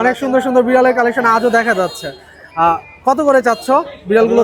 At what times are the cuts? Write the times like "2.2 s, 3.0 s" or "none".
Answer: none